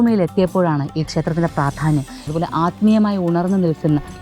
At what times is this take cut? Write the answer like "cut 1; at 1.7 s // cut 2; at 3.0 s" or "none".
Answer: cut 1; at 2.3 s